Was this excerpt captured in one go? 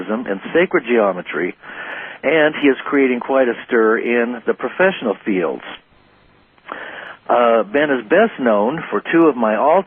no; 1 cut; at 1.5 s

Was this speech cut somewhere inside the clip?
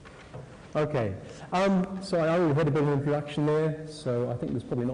yes; 1 cut; at 1.8 s

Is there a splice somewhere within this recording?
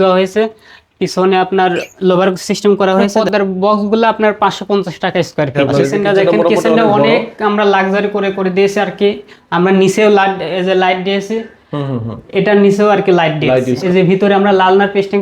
yes; 3 cuts; at 3.2 s, 5.6 s, 13.8 s

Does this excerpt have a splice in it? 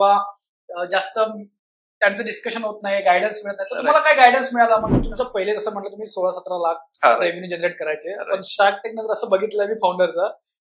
yes; 1 cut; at 5.0 s

